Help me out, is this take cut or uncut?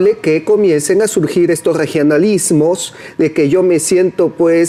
uncut